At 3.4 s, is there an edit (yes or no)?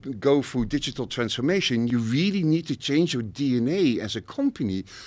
no